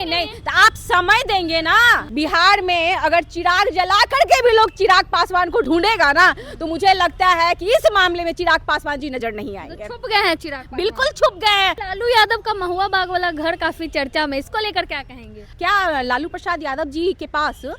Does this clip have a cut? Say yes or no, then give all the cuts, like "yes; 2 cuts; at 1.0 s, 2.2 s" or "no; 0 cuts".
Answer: yes; 4 cuts; at 2.0 s, 5.7 s, 11.8 s, 15.5 s